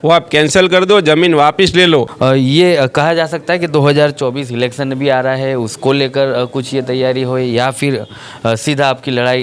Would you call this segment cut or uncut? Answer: cut